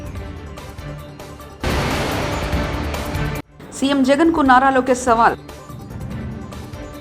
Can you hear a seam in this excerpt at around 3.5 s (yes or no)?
yes